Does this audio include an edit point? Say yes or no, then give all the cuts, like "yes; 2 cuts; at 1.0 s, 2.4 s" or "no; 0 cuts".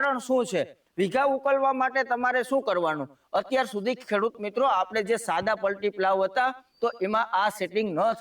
yes; 1 cut; at 3.2 s